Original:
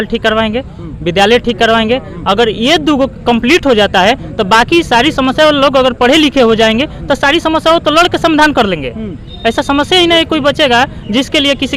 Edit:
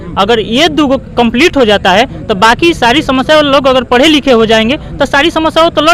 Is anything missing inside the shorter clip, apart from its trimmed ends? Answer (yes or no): no